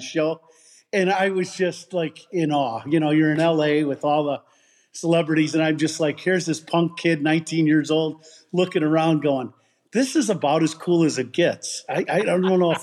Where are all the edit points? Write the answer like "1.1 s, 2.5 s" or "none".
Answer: none

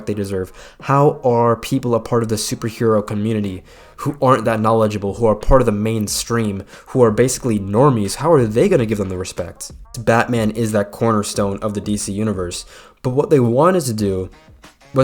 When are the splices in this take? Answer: 10.0 s

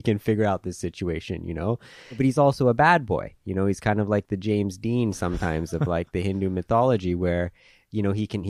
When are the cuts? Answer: 2.2 s

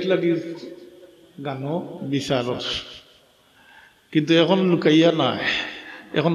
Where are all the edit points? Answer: 2.0 s

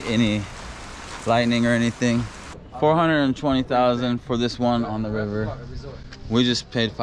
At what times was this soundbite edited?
none

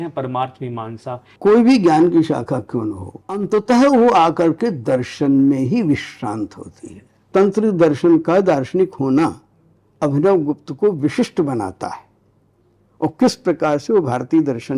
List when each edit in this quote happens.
1.3 s, 3.4 s, 7.3 s

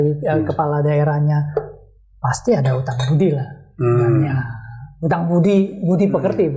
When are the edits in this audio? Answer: none

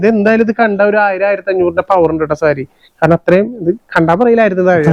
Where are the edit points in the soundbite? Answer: none

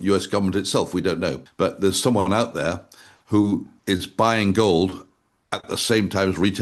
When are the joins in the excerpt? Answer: 1.4 s, 3.7 s

